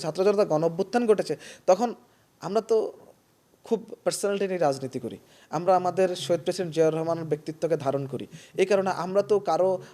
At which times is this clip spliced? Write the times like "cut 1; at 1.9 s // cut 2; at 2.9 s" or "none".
none